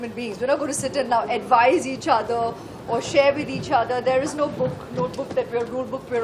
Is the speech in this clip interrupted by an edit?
no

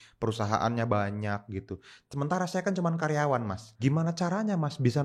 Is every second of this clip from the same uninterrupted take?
no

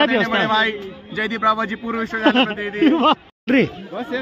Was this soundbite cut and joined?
yes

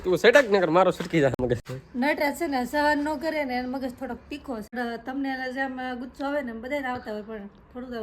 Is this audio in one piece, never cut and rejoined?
no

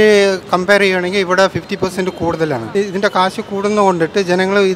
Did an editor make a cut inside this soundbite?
yes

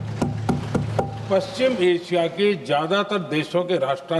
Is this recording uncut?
yes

